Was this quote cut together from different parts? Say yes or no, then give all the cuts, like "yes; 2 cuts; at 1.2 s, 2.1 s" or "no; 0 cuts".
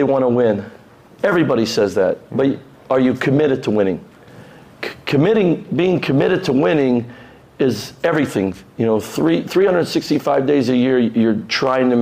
no; 0 cuts